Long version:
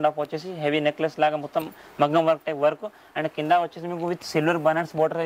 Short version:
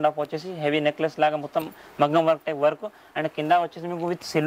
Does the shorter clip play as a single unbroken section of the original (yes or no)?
yes